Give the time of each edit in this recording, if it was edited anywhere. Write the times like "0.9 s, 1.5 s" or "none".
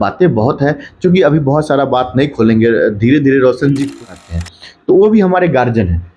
4.0 s